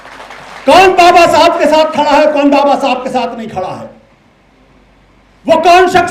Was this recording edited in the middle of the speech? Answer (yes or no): no